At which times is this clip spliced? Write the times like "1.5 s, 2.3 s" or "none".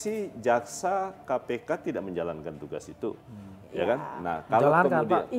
none